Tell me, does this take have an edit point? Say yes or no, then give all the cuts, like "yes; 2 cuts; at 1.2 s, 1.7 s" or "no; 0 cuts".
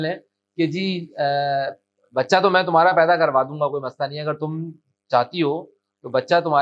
no; 0 cuts